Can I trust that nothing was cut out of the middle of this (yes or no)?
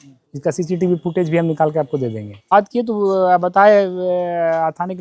no